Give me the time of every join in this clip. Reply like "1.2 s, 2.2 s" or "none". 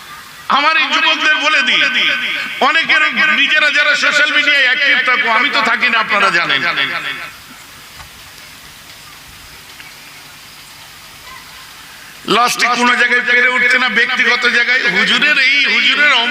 7.3 s